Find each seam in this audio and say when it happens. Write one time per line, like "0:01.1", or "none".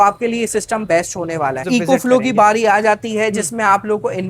0:01.6